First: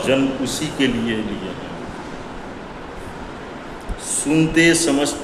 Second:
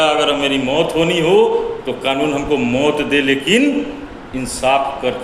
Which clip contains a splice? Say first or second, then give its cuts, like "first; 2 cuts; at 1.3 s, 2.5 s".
second; 1 cut; at 1.2 s